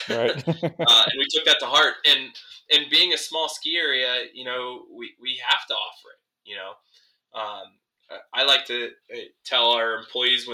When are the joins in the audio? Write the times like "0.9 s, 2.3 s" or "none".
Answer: none

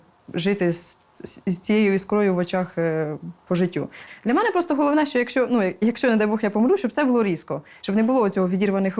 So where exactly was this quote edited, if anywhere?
4.0 s

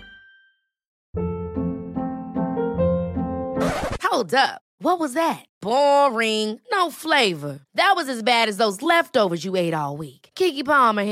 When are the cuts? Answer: 1.0 s

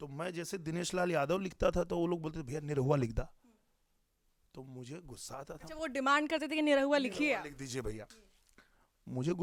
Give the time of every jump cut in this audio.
none

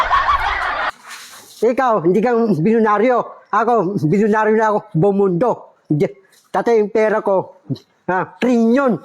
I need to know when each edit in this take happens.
1.0 s

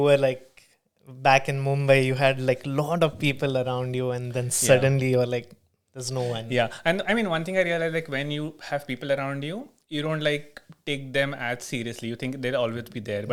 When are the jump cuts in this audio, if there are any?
none

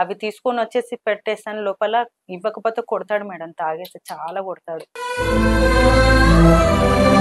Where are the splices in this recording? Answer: none

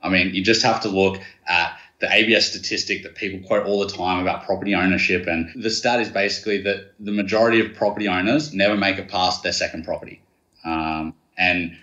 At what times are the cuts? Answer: 5.5 s

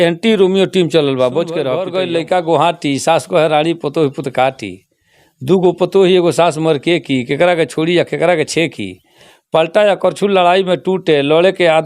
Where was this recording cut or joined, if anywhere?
1.8 s

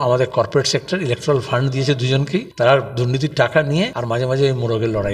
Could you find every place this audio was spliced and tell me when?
2.5 s, 4.0 s

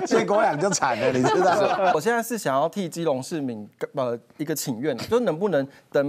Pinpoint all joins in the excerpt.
2.0 s

